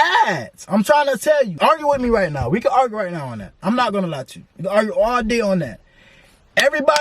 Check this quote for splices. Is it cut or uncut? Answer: cut